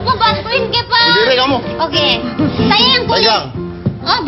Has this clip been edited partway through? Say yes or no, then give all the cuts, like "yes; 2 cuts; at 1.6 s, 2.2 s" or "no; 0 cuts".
no; 0 cuts